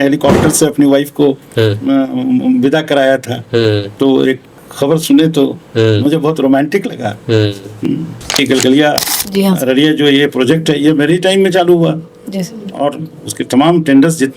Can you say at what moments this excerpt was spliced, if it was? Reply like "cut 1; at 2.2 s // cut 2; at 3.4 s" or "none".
cut 1; at 8.4 s

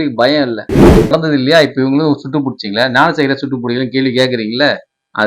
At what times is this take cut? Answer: cut 1; at 1.1 s

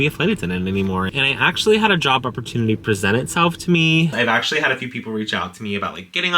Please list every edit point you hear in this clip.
cut 1; at 1.1 s // cut 2; at 4.1 s

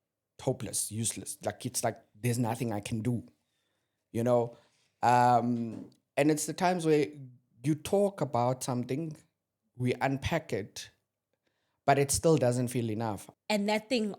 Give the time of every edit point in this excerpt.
cut 1; at 13.3 s

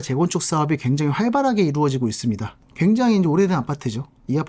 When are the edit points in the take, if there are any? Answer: cut 1; at 2.5 s

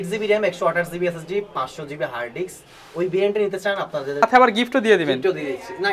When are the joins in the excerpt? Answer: cut 1; at 4.2 s

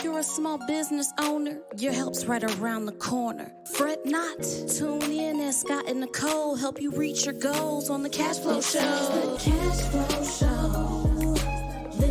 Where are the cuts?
cut 1; at 9.4 s

